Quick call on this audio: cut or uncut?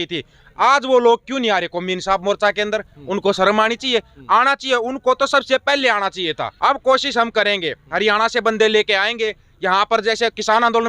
cut